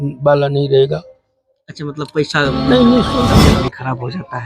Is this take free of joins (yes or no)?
no